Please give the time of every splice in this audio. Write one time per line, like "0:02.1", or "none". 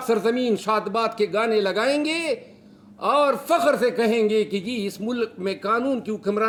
none